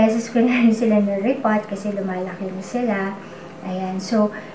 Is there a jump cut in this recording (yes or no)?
no